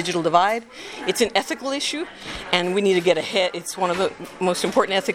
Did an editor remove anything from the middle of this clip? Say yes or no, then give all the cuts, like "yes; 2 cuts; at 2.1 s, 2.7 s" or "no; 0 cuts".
no; 0 cuts